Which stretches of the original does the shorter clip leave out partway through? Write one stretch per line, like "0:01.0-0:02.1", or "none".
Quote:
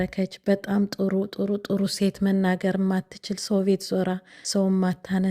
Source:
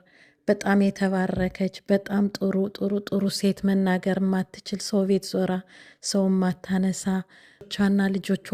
0:05.7-0:05.9